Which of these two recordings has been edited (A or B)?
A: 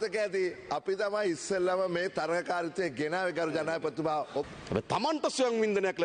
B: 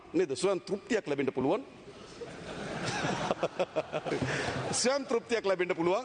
A